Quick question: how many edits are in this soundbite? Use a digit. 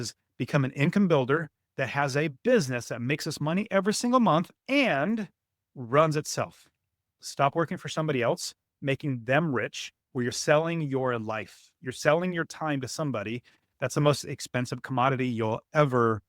1